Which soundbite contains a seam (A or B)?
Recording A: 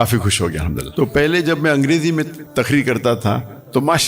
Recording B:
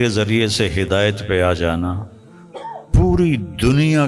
A